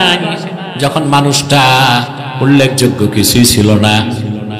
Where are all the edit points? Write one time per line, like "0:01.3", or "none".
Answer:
none